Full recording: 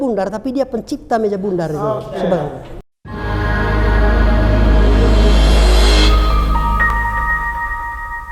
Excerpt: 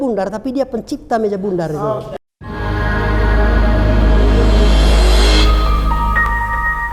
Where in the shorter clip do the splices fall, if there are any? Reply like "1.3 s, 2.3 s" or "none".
2.1 s